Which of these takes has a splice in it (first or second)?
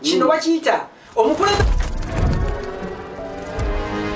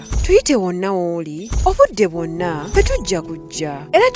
first